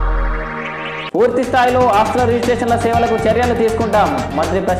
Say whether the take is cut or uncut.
uncut